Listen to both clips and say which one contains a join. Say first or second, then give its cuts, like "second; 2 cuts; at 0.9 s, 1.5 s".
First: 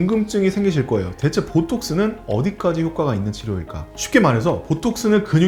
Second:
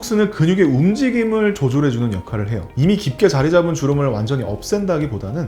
second; 1 cut; at 2.6 s